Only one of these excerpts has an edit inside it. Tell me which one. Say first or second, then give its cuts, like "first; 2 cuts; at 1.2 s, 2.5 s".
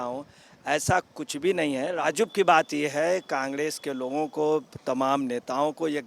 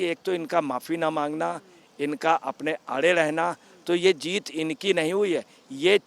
first; 1 cut; at 1.9 s